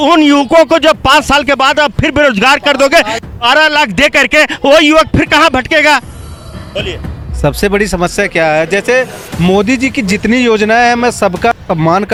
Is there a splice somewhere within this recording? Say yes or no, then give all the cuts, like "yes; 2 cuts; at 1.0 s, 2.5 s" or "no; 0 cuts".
no; 0 cuts